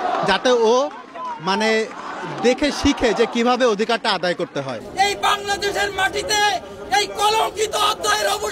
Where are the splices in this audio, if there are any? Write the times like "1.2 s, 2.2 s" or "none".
4.8 s